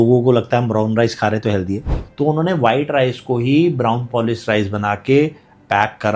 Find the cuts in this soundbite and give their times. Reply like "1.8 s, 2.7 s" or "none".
2.0 s